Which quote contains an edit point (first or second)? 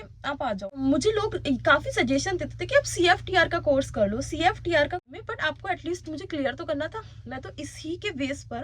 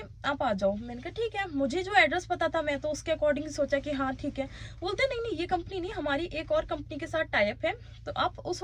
first